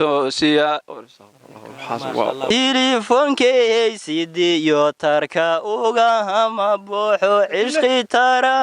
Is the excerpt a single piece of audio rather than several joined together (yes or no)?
no